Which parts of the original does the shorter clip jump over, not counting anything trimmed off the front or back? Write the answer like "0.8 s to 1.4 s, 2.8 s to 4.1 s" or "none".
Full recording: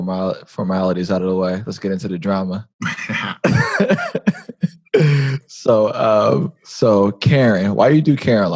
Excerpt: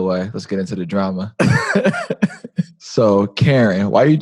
2.6 s to 3.3 s, 4.8 s to 6.6 s